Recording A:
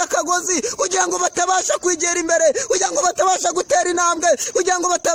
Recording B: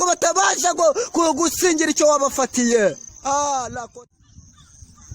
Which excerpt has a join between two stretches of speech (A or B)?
B